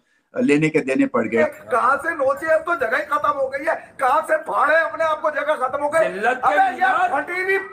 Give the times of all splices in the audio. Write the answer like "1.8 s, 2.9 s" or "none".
1.4 s